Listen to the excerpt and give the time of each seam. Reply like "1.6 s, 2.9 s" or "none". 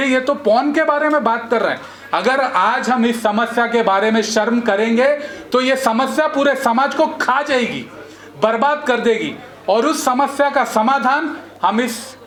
none